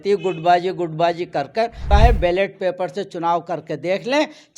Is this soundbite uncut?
no; 1 cut; at 1.8 s

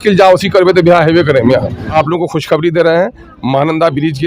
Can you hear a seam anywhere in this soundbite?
yes; 1 cut; at 1.9 s

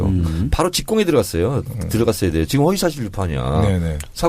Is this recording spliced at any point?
yes; 1 cut; at 3.1 s

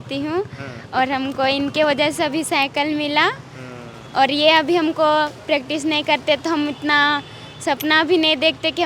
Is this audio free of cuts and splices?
yes; 0 cuts

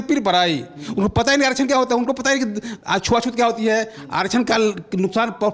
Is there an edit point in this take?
no; 0 cuts

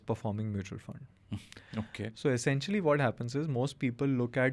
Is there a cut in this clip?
no; 0 cuts

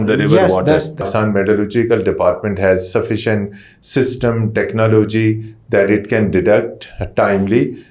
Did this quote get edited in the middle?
yes; 1 cut; at 1.0 s

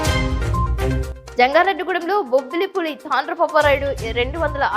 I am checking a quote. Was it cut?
yes; 1 cut; at 1.0 s

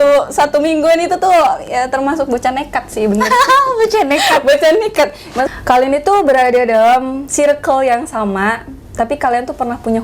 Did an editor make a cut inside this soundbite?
yes; 1 cut; at 5.5 s

